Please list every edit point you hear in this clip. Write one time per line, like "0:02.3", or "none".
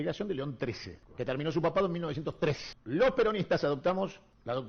none